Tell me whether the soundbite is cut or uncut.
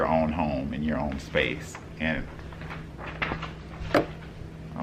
uncut